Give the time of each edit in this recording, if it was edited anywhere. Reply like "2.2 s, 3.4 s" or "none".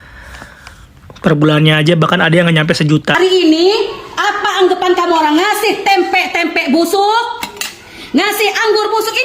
3.2 s